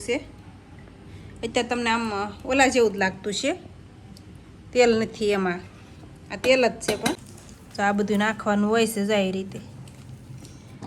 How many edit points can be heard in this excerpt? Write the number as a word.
one